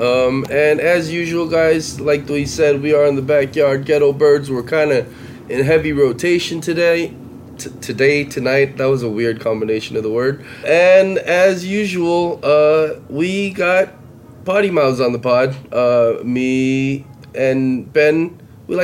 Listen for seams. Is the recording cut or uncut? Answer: cut